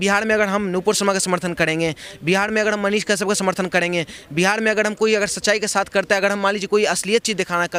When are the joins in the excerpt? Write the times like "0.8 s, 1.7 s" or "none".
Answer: none